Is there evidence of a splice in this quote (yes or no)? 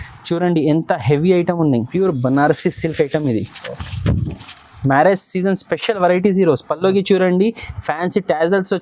yes